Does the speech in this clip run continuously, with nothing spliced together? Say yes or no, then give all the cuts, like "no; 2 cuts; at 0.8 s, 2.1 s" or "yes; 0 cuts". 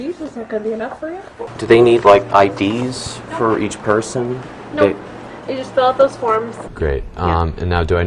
no; 2 cuts; at 1.5 s, 6.6 s